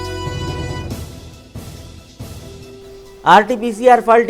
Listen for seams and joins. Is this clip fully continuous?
no; 1 cut; at 2.3 s

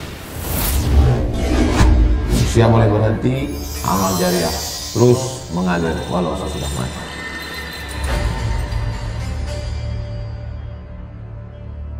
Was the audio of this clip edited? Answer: no; 0 cuts

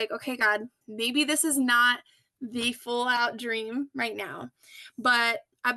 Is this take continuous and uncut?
yes; 0 cuts

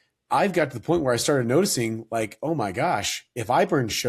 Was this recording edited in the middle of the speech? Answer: no; 0 cuts

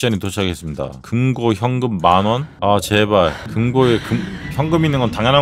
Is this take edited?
yes; 3 cuts; at 1.0 s, 2.5 s, 3.4 s

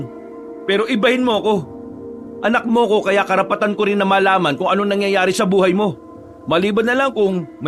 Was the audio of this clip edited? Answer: no; 0 cuts

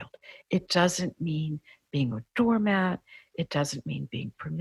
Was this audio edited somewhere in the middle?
no; 0 cuts

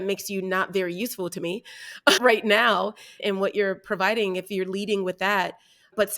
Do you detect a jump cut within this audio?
yes; 1 cut; at 3.2 s

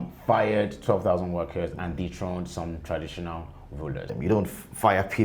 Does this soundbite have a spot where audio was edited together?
yes; 1 cut; at 4.1 s

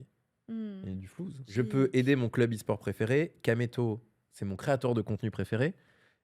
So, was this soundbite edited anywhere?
yes; 1 cut; at 1.5 s

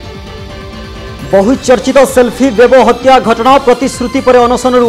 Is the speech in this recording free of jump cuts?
no; 1 cut; at 1.0 s

